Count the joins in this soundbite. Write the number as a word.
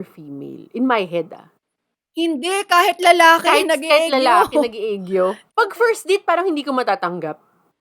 one